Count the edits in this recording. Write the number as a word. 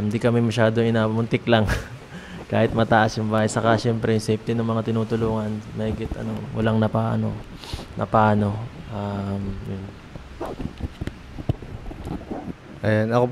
zero